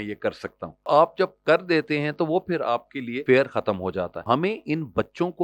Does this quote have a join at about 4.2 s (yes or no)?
yes